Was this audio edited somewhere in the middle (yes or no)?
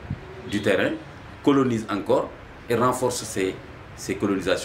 no